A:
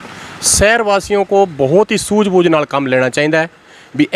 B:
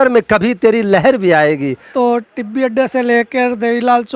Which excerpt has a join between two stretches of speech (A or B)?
B